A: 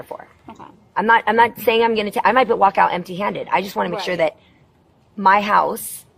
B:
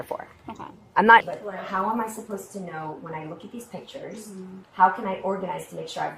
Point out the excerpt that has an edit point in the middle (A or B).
B